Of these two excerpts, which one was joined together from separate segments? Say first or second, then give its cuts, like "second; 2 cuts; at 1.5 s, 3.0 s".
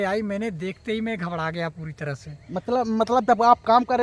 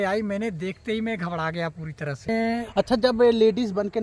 second; 1 cut; at 2.3 s